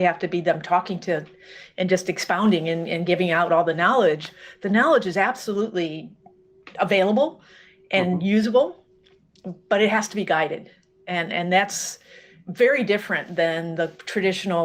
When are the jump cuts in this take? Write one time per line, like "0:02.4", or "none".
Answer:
none